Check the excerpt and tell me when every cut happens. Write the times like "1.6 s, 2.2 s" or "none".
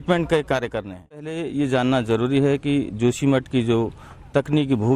1.4 s